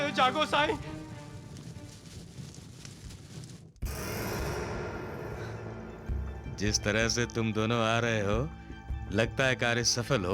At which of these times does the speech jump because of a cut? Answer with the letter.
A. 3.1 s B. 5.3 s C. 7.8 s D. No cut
D